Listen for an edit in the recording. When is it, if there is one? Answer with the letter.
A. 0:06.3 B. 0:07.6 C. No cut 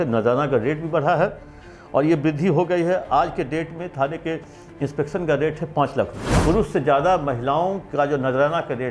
A